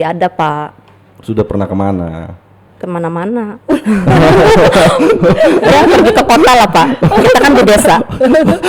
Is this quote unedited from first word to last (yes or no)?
yes